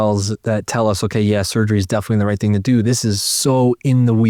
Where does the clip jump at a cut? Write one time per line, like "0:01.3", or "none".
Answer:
none